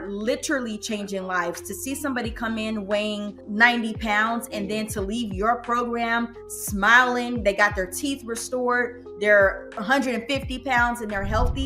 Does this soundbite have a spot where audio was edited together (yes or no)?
yes